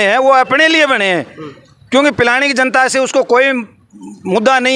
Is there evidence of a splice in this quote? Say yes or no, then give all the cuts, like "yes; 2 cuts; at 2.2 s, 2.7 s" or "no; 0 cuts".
no; 0 cuts